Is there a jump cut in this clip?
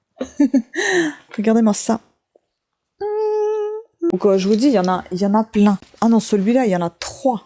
yes; 2 cuts; at 4.1 s, 5.8 s

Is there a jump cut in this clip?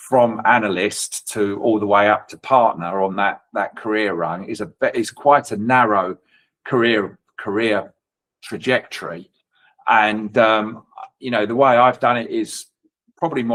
no; 0 cuts

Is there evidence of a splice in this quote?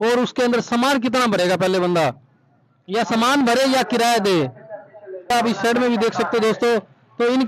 yes; 1 cut; at 5.3 s

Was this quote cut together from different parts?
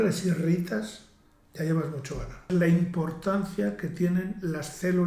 yes; 1 cut; at 2.5 s

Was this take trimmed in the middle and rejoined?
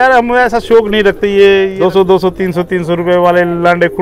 yes; 1 cut; at 1.7 s

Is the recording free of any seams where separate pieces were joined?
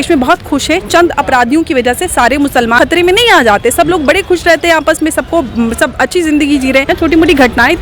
no; 2 cuts; at 2.8 s, 6.9 s

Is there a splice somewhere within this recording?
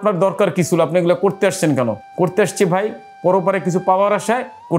yes; 1 cut; at 2.0 s

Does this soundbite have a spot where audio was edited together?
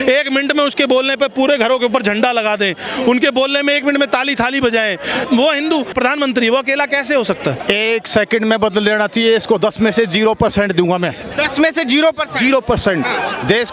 yes; 3 cuts; at 5.2 s, 5.9 s, 7.6 s

